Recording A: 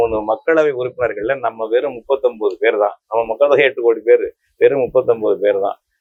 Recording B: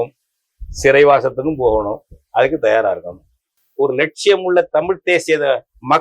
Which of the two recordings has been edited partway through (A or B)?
B